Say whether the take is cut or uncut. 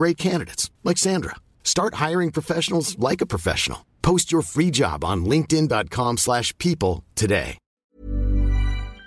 cut